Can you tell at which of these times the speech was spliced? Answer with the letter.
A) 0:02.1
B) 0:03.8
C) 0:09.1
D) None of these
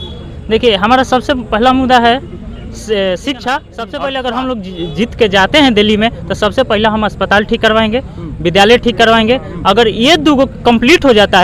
B